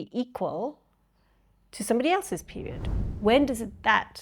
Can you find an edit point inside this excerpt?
yes; 1 cut; at 2.8 s

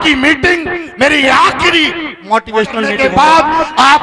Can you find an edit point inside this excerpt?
yes; 1 cut; at 3.0 s

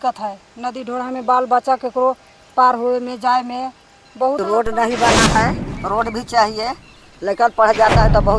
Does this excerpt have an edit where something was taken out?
yes; 1 cut; at 4.4 s

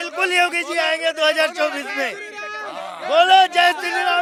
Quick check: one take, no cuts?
yes; 0 cuts

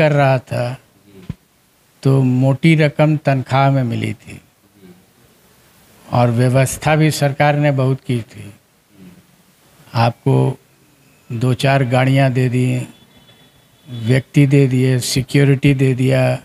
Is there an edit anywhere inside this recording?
no; 0 cuts

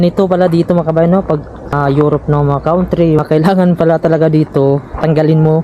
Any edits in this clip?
yes; 2 cuts; at 1.7 s, 3.2 s

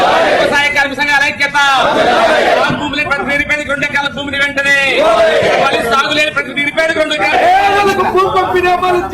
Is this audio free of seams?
yes; 0 cuts

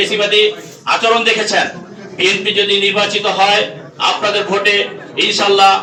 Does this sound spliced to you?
no; 0 cuts

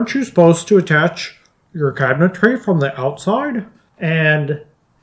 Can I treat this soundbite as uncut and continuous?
no; 1 cut; at 3.8 s

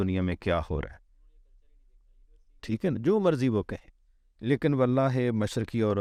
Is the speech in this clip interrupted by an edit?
no; 0 cuts

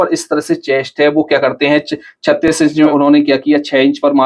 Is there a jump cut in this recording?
yes; 1 cut; at 2.6 s

